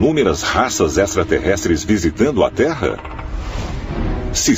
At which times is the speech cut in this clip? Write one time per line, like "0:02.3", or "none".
0:02.5